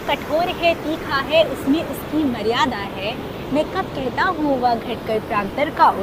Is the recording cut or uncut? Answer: uncut